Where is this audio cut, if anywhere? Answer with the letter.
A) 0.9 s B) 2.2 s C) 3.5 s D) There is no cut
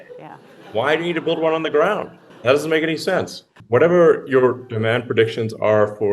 C